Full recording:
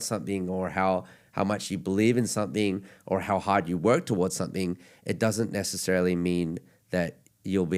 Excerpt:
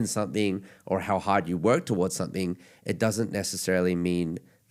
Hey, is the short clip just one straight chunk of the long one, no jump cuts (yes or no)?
yes